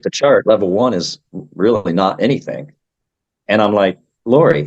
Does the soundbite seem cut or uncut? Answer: uncut